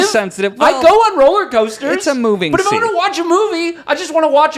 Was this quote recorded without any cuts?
yes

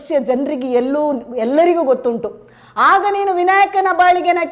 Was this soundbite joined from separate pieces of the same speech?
no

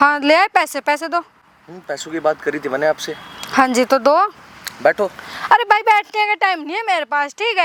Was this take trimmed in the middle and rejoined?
no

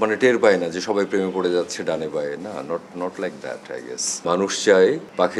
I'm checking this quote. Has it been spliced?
yes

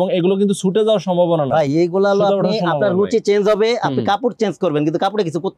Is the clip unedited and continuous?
yes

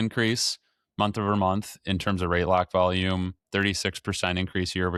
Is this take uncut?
yes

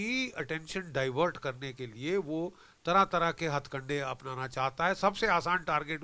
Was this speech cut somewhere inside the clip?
no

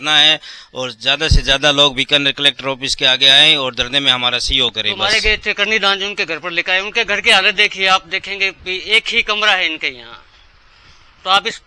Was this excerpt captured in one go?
no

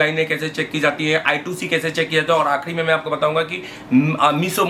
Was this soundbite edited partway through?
no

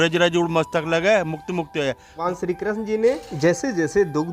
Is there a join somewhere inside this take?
yes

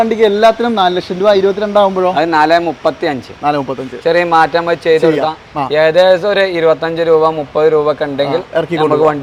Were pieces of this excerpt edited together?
no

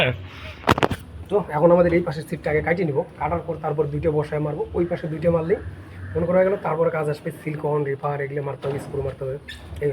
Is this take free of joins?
yes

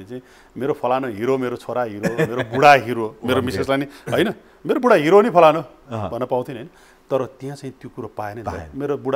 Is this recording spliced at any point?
no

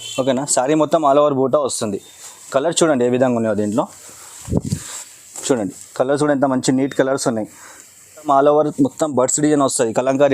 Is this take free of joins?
no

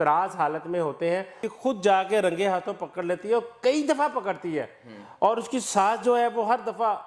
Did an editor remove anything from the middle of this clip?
yes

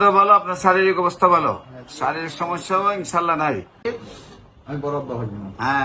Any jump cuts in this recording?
yes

